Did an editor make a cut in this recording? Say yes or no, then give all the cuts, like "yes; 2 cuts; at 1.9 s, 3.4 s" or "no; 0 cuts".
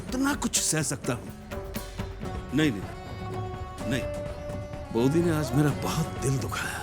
yes; 1 cut; at 2.3 s